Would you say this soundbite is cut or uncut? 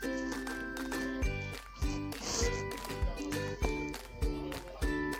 uncut